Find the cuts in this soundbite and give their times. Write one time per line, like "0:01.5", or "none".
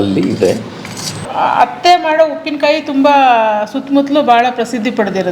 0:01.3